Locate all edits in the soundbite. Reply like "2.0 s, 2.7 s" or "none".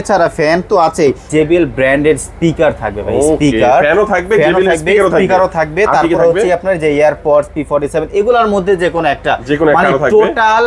1.2 s